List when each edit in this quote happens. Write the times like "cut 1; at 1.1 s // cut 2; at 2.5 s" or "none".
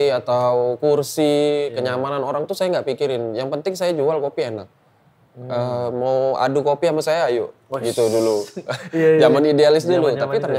none